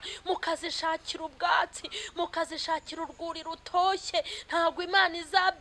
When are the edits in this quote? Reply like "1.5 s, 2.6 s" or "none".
none